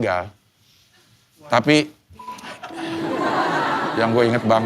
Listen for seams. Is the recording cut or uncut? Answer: uncut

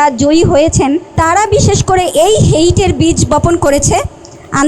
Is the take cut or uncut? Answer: cut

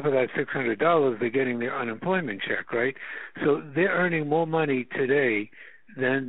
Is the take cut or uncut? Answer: uncut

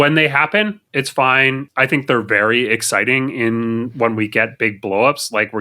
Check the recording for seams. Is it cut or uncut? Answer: cut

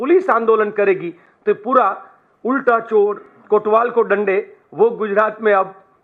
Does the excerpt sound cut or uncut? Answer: uncut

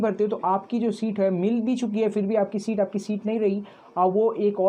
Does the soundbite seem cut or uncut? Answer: uncut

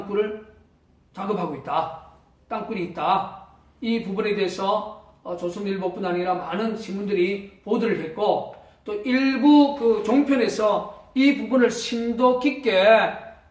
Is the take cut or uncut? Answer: uncut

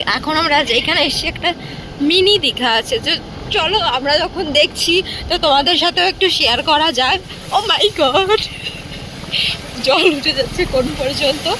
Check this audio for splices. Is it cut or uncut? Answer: uncut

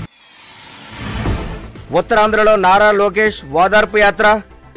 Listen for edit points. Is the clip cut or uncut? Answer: uncut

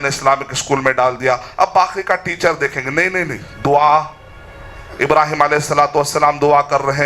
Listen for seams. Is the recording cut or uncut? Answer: uncut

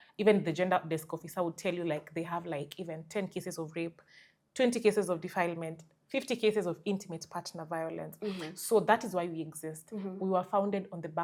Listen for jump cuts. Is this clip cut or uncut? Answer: uncut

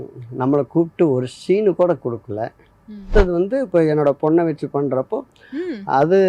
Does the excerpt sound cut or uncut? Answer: cut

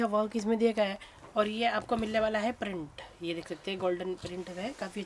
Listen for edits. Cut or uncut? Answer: uncut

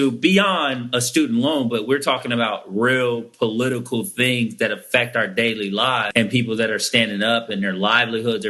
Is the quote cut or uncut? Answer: cut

